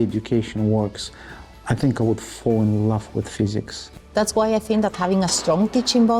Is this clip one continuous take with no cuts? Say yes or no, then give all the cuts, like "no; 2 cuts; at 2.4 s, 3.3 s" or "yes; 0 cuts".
no; 1 cut; at 3.8 s